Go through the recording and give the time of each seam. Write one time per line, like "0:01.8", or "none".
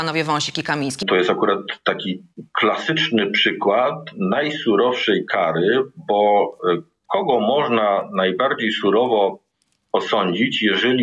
0:01.0

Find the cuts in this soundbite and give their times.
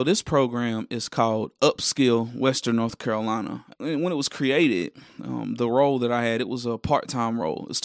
0:03.6

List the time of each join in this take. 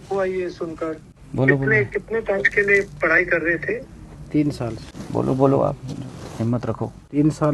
none

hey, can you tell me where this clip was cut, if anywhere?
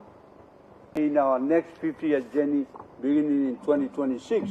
0:01.0

